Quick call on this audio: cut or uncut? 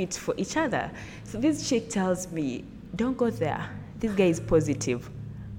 uncut